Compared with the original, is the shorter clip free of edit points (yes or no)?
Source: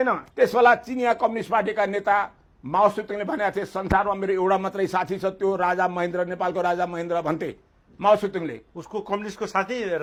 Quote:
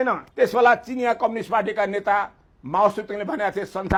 yes